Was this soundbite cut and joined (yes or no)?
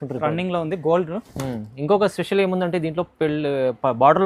no